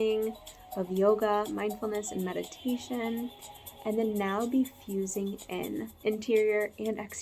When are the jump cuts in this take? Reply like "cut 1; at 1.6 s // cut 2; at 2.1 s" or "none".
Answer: cut 1; at 6.0 s